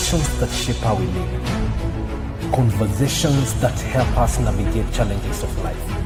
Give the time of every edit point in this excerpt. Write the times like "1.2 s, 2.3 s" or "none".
none